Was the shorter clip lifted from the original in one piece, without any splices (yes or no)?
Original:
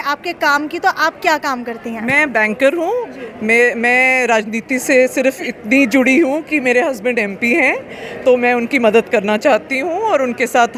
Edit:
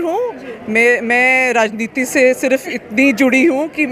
yes